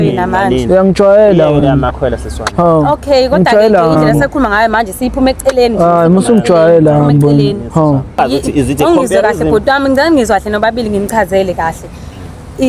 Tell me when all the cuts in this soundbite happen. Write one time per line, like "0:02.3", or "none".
0:08.2